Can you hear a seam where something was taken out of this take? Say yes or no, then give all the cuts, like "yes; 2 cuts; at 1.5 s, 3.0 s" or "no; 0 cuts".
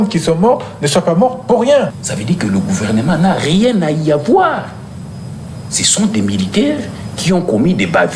yes; 1 cut; at 1.9 s